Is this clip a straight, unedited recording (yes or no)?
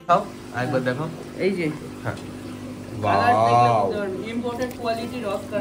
yes